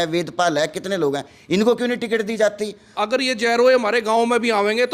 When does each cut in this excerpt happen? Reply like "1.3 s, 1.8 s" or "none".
3.0 s